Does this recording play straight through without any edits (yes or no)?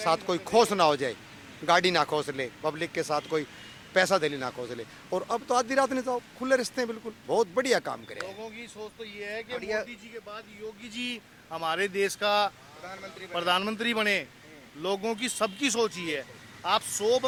yes